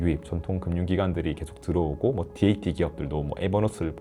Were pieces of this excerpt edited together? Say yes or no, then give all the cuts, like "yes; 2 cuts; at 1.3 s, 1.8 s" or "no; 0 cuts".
no; 0 cuts